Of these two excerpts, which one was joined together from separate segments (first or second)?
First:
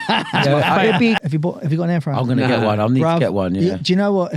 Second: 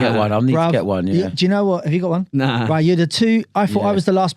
first